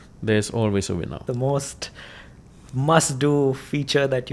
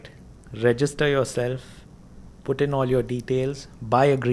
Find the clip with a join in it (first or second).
first